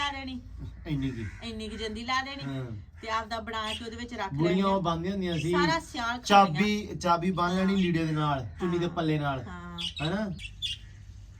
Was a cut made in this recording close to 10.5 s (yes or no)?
yes